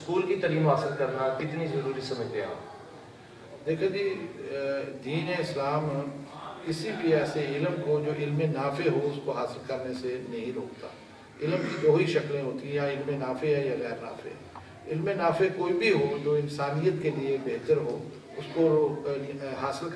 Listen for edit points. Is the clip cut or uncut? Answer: uncut